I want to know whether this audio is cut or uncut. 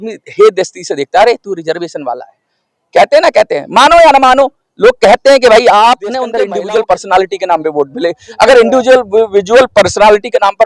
cut